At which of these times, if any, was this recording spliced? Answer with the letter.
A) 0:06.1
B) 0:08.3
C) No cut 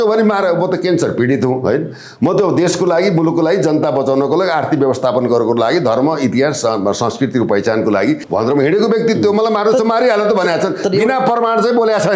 B